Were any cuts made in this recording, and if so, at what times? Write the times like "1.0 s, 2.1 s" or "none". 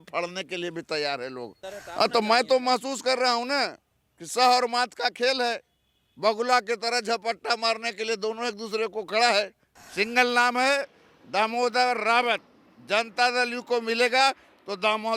1.6 s, 9.6 s